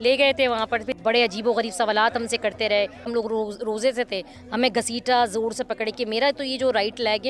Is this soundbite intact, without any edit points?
no; 2 cuts; at 0.9 s, 3.1 s

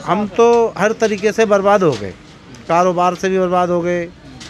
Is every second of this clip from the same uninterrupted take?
yes; 0 cuts

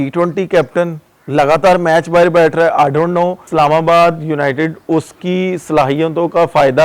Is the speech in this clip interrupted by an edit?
yes; 1 cut; at 3.5 s

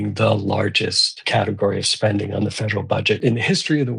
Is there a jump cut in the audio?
yes; 2 cuts; at 1.2 s, 3.2 s

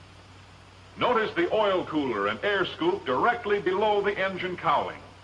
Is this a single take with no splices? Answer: no; 1 cut; at 1.0 s

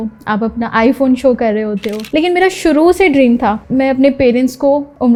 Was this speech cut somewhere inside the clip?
no; 0 cuts

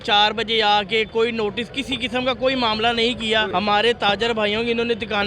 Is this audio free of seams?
no; 1 cut; at 3.5 s

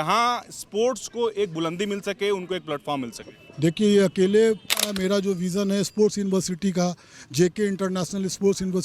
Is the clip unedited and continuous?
no; 1 cut; at 4.9 s

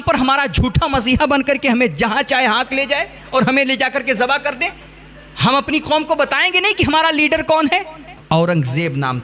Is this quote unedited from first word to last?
no; 1 cut; at 8.1 s

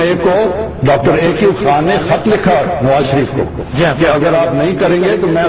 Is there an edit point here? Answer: no; 0 cuts

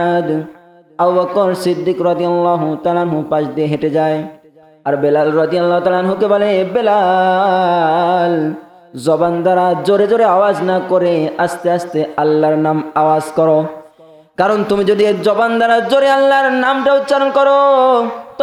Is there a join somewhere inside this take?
no; 0 cuts

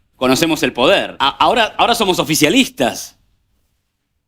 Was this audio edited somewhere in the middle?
yes; 1 cut; at 1.1 s

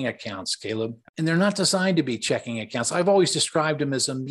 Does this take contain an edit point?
yes; 1 cut; at 1.0 s

